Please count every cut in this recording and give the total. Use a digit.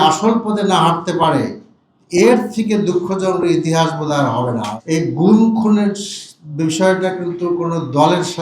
1